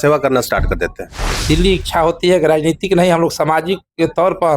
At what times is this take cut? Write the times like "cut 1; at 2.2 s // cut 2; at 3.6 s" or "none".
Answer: cut 1; at 1.4 s